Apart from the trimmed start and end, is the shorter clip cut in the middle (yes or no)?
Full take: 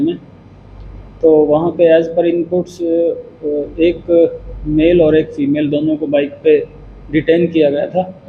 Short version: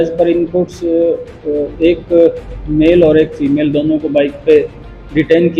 no